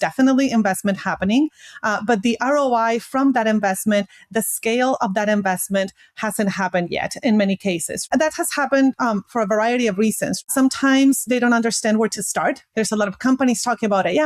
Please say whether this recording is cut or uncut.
cut